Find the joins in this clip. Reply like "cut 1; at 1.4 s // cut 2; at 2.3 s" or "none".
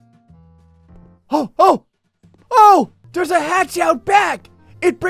cut 1; at 3.0 s